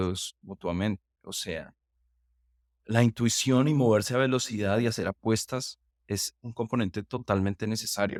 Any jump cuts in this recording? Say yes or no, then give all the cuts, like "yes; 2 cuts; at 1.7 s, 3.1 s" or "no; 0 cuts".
no; 0 cuts